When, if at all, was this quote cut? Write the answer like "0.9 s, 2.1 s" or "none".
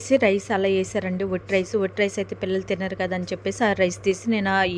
none